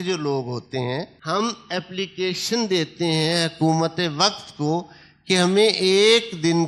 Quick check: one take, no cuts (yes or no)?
no